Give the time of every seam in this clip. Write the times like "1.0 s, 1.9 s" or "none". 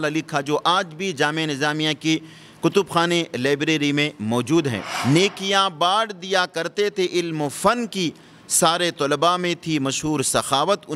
4.9 s